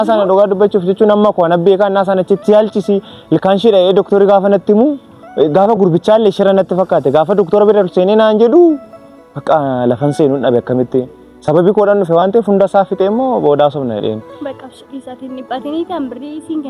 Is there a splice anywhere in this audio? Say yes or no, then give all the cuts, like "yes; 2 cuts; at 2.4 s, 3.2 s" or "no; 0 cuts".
no; 0 cuts